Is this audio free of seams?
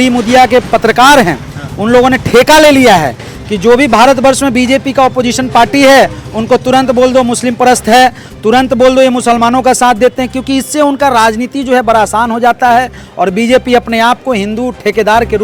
yes; 0 cuts

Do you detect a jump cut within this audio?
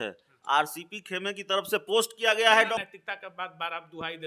yes; 1 cut; at 2.7 s

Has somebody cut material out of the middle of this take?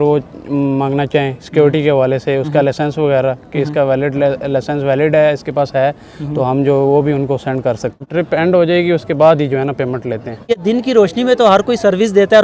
yes; 2 cuts; at 8.1 s, 10.5 s

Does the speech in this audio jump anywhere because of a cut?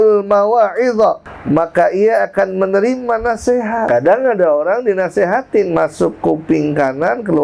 yes; 2 cuts; at 1.3 s, 3.9 s

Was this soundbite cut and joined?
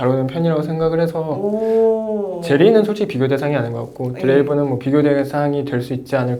no; 0 cuts

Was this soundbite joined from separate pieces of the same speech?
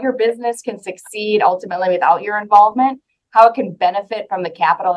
no; 0 cuts

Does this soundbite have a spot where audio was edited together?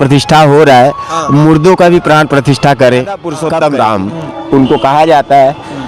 yes; 1 cut; at 3.3 s

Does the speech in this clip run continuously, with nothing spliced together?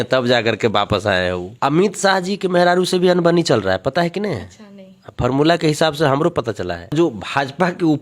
no; 2 cuts; at 1.5 s, 6.9 s

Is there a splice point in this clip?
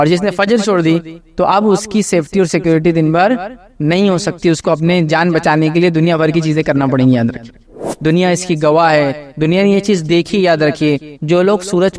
yes; 1 cut; at 7.7 s

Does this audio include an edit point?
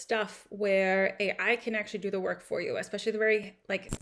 no; 0 cuts

